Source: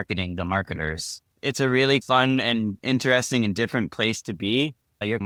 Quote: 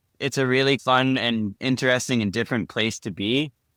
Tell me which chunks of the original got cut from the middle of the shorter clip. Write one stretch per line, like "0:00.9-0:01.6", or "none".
none